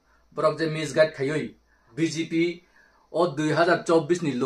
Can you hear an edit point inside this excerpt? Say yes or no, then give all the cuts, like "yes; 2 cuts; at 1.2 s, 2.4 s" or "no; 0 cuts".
yes; 1 cut; at 1.6 s